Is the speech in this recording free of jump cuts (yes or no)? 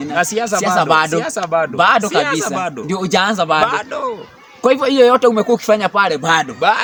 yes